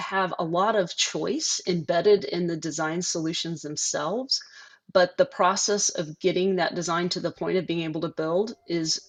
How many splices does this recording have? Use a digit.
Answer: 0